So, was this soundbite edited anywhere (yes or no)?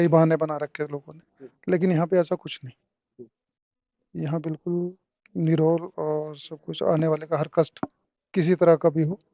no